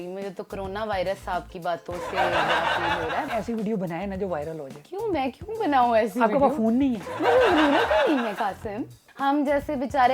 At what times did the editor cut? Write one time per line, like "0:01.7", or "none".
0:02.0
0:03.2
0:09.0